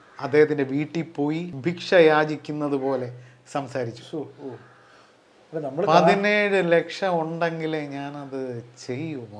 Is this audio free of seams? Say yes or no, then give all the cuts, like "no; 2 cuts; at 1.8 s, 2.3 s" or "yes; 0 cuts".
no; 1 cut; at 1.5 s